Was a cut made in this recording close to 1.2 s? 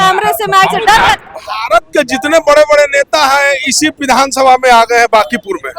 yes; 1 cut; at 1.2 s

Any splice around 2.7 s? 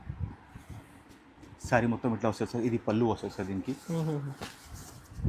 no; 0 cuts

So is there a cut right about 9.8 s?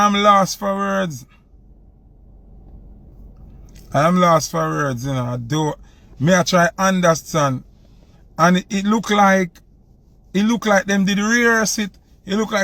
no; 0 cuts

